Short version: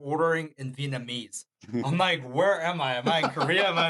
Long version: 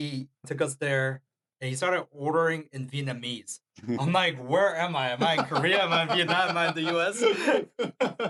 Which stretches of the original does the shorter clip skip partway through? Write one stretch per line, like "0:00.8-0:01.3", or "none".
none